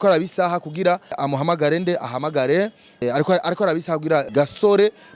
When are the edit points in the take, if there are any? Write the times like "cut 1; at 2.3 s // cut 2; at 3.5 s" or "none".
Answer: cut 1; at 1.2 s // cut 2; at 3.0 s // cut 3; at 4.3 s